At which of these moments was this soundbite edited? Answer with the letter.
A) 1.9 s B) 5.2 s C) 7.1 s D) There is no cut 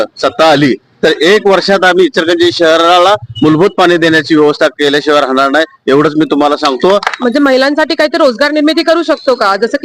C